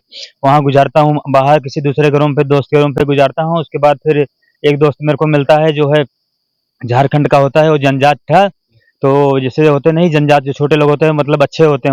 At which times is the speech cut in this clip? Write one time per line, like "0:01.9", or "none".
none

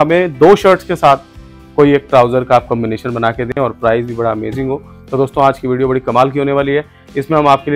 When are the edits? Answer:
none

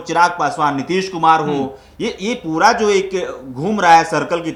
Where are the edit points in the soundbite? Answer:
none

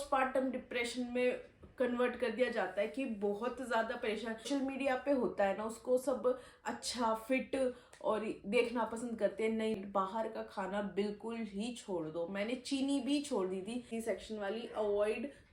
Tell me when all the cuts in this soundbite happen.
0:04.5
0:09.8
0:13.9

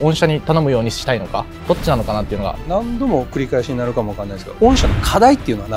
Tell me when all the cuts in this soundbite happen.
0:01.5
0:02.6

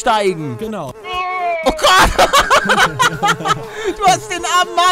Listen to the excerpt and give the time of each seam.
0:01.0

